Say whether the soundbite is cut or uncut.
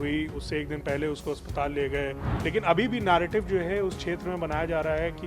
cut